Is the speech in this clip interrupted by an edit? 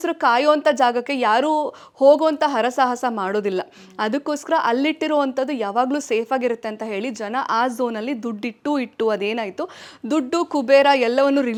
no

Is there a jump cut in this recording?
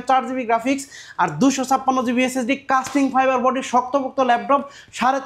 no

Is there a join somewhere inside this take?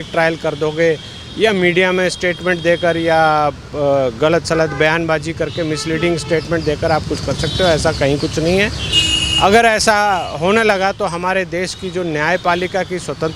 no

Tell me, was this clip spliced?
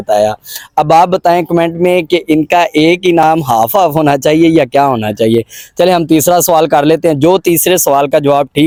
no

